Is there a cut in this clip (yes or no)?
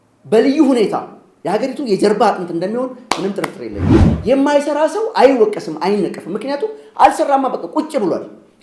yes